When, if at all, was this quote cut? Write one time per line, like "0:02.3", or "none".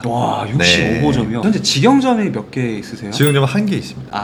none